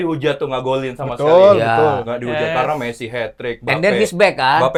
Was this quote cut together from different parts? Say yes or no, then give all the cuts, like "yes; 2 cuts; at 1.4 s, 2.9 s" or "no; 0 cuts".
no; 0 cuts